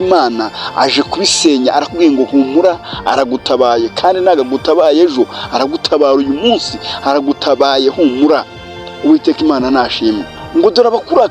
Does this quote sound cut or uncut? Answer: cut